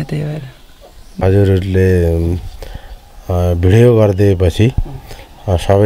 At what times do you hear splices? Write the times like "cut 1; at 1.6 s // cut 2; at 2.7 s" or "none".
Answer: cut 1; at 1.2 s